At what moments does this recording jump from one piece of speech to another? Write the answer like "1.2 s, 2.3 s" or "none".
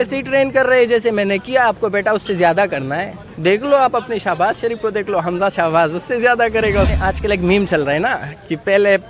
6.9 s